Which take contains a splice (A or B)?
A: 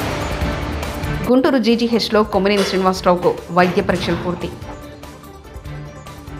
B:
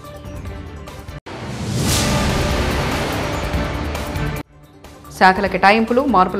B